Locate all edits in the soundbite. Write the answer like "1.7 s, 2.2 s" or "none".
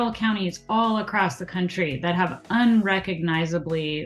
none